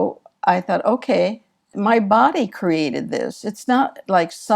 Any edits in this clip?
yes; 1 cut; at 1.7 s

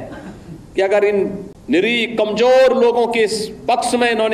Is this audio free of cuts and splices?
no; 1 cut; at 1.5 s

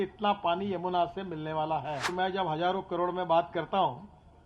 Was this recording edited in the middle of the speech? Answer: yes; 1 cut; at 2.1 s

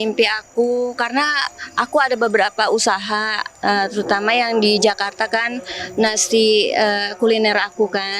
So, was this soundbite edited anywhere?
no; 0 cuts

